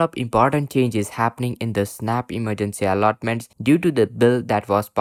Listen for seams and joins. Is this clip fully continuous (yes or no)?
yes